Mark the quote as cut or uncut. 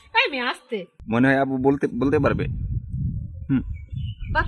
cut